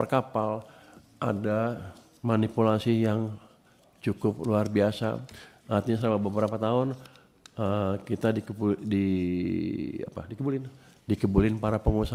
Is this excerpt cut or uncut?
uncut